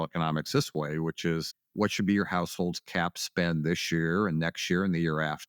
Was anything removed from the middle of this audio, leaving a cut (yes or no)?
yes